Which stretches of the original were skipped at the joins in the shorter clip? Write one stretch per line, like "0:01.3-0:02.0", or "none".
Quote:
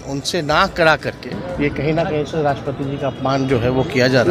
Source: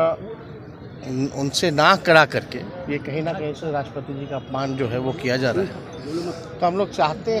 none

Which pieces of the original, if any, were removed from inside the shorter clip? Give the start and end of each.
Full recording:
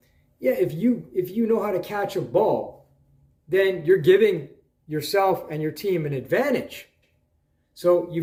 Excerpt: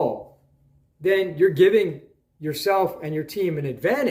none

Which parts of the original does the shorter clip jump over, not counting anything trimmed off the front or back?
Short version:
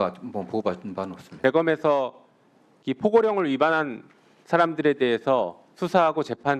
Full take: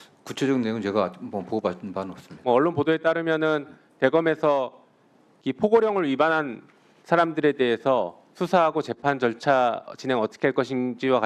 0:02.2-0:03.8

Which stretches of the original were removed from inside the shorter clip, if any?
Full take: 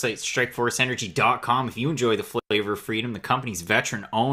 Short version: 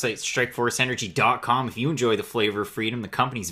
0:02.4-0:02.5

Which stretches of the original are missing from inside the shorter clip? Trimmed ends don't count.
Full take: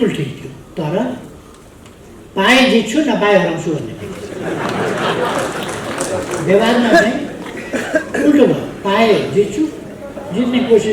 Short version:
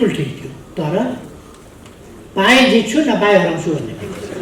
none

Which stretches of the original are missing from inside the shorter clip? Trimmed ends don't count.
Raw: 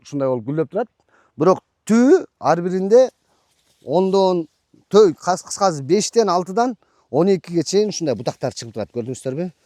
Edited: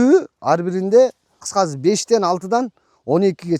0:03.4-0:05.5

